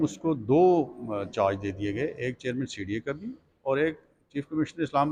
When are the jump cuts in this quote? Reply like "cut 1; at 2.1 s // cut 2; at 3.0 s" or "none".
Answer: none